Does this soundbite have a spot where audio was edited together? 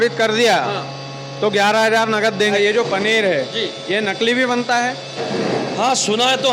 yes; 1 cut; at 2.5 s

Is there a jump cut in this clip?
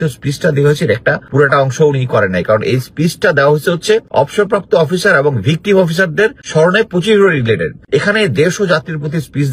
yes; 4 cuts; at 1.2 s, 4.1 s, 6.4 s, 7.7 s

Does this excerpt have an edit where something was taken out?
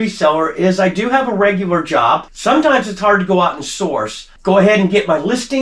yes; 1 cut; at 2.3 s

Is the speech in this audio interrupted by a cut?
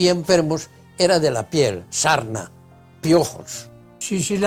no; 0 cuts

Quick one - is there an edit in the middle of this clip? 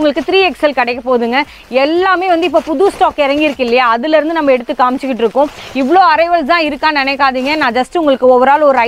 no; 0 cuts

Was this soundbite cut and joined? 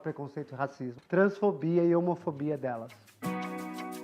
yes; 2 cuts; at 1.0 s, 3.2 s

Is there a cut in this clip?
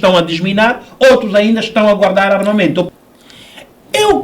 yes; 1 cut; at 2.9 s

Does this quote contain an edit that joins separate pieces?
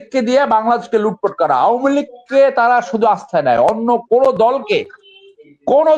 no; 0 cuts

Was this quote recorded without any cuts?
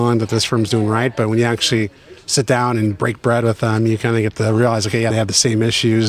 no; 1 cut; at 5.1 s

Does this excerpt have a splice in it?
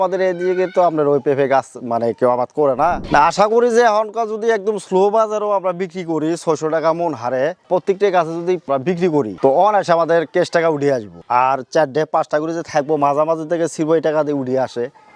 yes; 1 cut; at 3.0 s

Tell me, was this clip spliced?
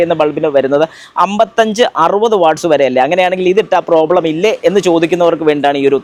no; 0 cuts

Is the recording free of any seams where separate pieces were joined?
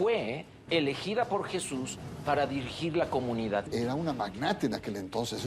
no; 1 cut; at 3.7 s

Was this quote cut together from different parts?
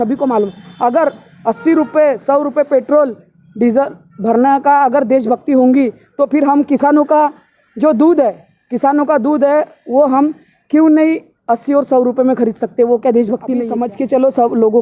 yes; 1 cut; at 13.7 s

